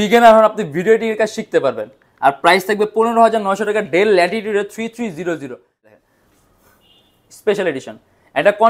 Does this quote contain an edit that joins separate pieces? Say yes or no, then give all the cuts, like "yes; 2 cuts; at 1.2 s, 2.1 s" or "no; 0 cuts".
yes; 1 cut; at 5.9 s